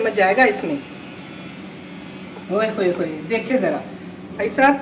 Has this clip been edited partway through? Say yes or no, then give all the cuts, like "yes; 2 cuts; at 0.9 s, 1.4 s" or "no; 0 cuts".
no; 0 cuts